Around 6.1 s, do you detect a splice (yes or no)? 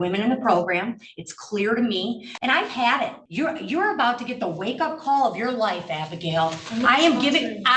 no